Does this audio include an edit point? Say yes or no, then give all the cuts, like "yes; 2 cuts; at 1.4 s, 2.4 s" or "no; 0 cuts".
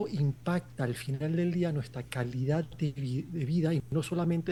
no; 0 cuts